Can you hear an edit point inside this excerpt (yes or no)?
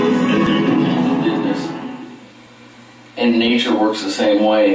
yes